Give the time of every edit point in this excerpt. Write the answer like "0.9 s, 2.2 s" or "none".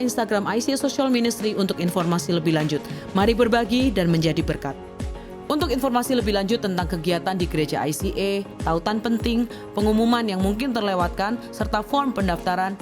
5.0 s